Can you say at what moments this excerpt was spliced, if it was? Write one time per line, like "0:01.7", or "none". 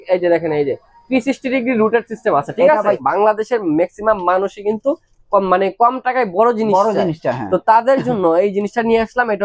0:02.9